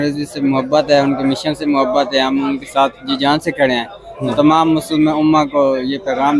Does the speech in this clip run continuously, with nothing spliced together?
yes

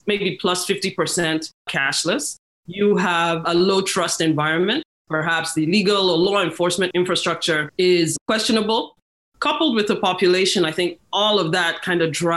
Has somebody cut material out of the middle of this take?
yes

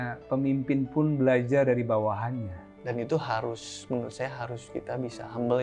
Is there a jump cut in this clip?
no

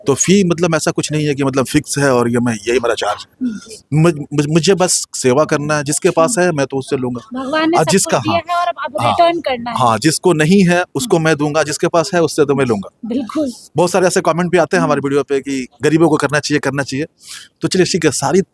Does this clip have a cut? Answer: no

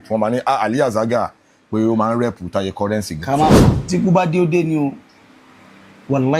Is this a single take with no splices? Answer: no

